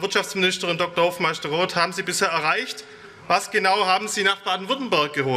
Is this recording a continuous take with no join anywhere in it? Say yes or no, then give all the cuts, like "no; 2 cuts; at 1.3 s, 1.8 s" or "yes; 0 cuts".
yes; 0 cuts